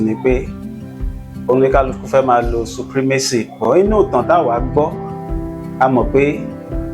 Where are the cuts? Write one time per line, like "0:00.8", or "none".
none